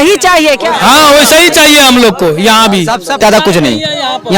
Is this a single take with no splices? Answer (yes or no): no